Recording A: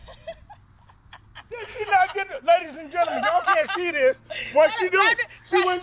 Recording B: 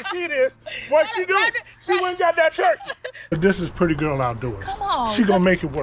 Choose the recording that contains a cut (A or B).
B